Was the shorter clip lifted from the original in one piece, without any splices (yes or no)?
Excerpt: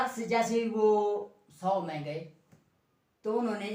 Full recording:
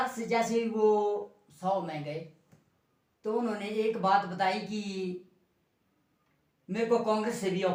yes